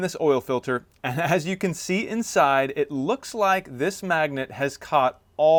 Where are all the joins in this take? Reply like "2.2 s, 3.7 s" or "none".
none